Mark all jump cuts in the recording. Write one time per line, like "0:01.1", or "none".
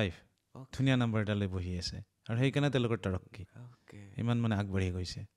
none